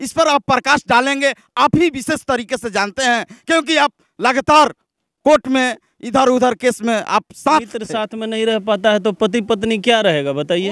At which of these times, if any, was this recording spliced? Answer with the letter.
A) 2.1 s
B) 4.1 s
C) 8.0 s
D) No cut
C